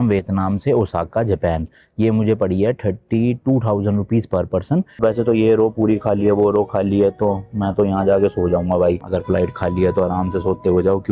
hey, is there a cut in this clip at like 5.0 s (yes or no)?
yes